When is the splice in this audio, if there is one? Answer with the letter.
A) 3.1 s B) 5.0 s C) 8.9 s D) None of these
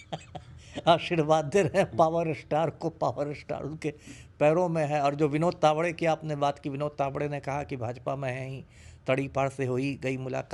D